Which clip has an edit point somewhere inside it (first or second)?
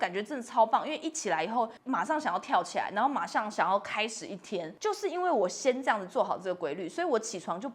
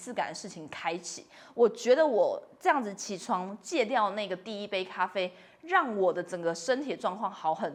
first